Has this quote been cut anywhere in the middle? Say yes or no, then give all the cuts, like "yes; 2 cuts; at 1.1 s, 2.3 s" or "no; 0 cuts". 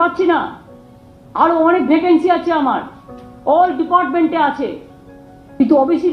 no; 0 cuts